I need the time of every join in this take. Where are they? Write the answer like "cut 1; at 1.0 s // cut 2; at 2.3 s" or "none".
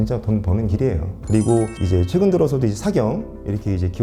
none